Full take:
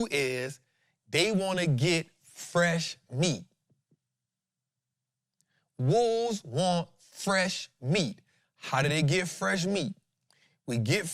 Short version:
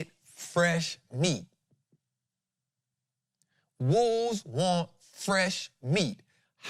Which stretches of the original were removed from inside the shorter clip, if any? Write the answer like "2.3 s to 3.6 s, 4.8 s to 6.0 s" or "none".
none